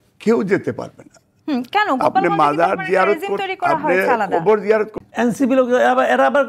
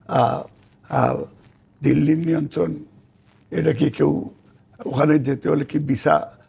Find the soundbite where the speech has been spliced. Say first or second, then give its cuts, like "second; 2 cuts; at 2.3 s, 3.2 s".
first; 1 cut; at 5.0 s